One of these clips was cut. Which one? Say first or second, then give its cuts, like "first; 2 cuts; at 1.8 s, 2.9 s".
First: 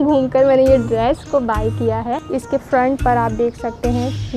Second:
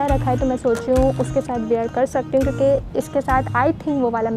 first; 1 cut; at 2.2 s